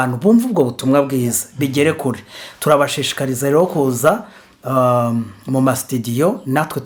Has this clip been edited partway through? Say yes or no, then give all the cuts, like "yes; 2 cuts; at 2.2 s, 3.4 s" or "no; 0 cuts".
no; 0 cuts